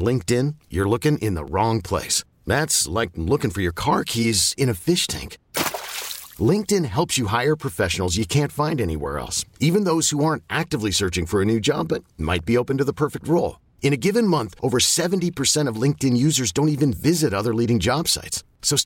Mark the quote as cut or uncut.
uncut